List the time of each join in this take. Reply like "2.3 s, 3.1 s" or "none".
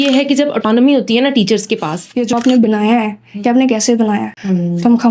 2.1 s